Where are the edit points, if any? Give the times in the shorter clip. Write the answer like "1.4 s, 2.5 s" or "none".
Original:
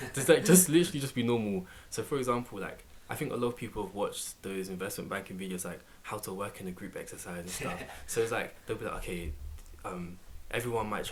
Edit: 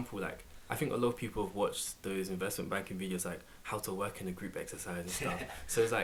none